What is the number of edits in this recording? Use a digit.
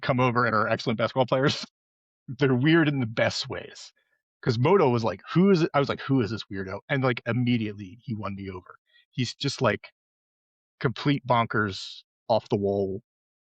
1